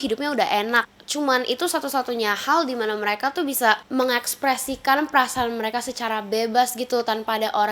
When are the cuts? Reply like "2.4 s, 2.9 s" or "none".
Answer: 1.0 s, 3.8 s